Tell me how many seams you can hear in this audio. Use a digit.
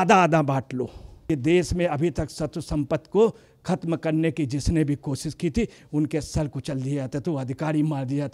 1